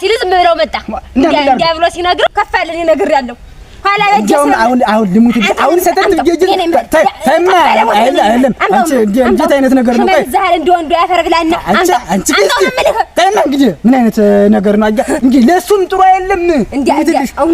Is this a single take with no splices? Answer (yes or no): no